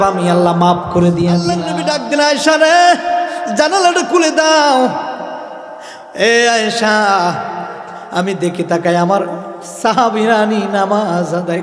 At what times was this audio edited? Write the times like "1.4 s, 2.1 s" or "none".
1.6 s